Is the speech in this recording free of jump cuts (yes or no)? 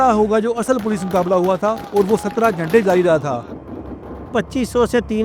no